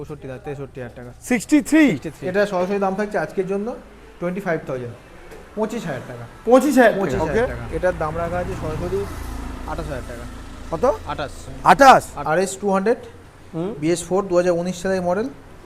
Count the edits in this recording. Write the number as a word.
three